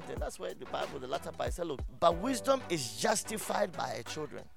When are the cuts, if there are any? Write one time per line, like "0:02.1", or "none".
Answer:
0:01.9